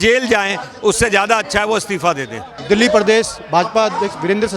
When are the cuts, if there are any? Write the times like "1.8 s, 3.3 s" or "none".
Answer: none